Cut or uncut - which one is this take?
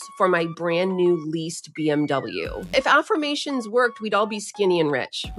cut